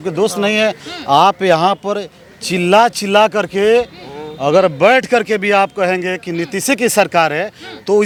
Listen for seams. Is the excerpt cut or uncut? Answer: uncut